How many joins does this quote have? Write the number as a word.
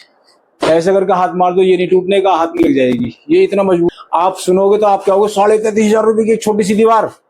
one